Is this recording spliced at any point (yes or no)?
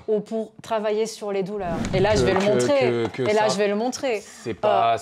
yes